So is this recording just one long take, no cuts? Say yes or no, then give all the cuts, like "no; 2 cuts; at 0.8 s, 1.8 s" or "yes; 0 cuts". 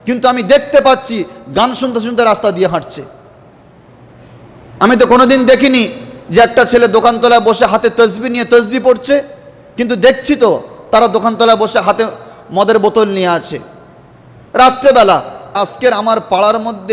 no; 1 cut; at 15.6 s